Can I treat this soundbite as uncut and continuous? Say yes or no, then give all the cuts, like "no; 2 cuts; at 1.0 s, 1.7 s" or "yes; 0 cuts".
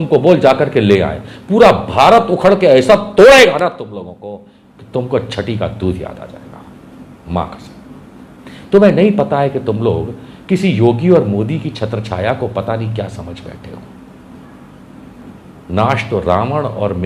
yes; 0 cuts